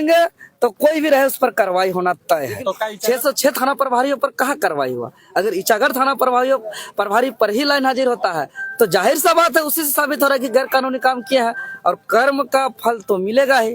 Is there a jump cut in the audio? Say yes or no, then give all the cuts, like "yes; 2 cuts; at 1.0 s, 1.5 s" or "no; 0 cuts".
yes; 1 cut; at 2.9 s